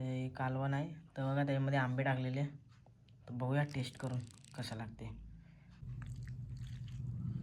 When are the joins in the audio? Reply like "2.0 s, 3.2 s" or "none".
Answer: 5.8 s